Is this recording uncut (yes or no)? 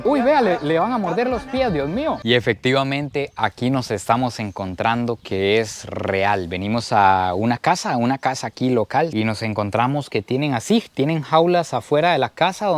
no